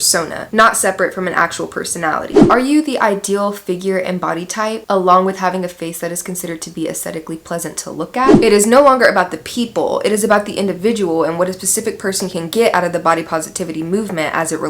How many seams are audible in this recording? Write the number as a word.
two